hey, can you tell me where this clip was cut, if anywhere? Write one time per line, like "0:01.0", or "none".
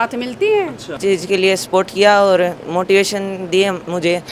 0:00.9